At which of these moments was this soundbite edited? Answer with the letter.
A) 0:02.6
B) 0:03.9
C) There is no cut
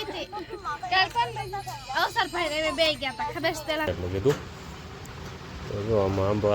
B